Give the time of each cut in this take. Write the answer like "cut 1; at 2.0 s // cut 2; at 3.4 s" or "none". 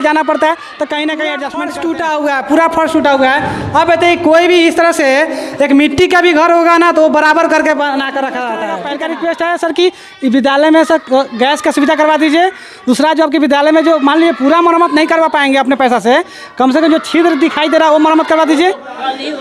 cut 1; at 1.6 s // cut 2; at 8.8 s